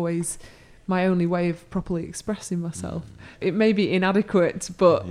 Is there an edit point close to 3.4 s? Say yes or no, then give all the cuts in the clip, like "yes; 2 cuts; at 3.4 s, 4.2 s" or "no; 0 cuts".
yes; 1 cut; at 3.4 s